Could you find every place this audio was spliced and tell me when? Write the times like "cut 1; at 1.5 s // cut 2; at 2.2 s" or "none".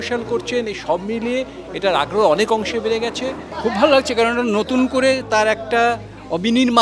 cut 1; at 3.5 s